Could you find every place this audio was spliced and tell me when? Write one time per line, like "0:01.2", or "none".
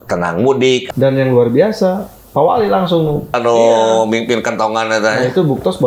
0:00.9
0:03.3

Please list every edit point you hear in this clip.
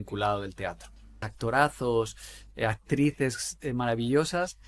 0:01.3

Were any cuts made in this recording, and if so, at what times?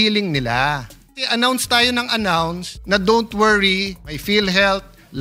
0:01.2
0:02.7
0:04.1

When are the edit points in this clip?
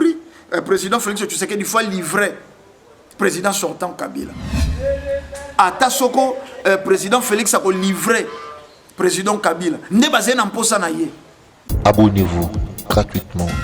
0:04.6
0:11.7

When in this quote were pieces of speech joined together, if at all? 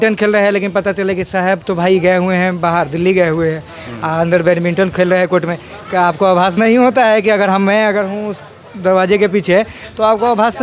none

